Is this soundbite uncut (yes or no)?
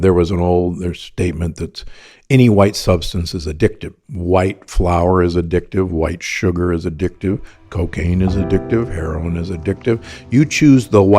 no